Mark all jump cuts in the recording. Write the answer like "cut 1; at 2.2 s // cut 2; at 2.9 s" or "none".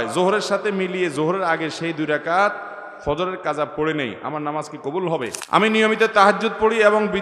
cut 1; at 5.4 s